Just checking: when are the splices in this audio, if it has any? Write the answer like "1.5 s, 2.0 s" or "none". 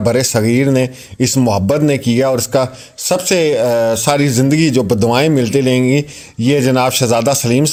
none